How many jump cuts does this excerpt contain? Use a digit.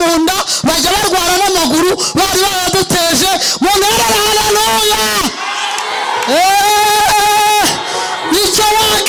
0